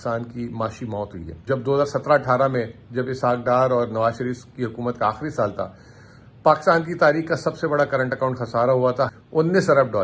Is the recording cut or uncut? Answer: cut